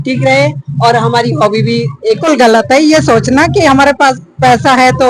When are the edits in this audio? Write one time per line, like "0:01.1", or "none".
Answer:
0:02.2